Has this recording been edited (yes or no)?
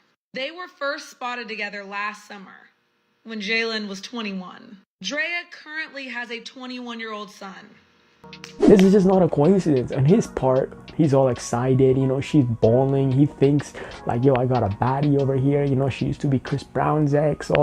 no